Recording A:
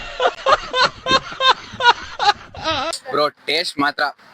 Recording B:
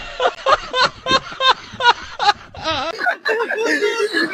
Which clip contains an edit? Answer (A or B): A